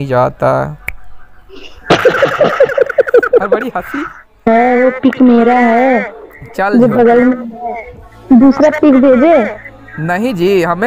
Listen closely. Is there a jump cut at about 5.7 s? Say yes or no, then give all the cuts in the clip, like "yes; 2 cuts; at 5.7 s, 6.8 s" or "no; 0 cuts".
no; 1 cut; at 4.5 s